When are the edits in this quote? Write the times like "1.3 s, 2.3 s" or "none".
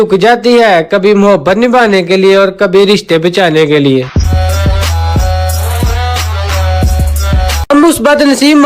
7.6 s